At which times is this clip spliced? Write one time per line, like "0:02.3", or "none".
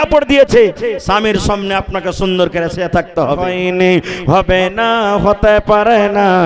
0:03.5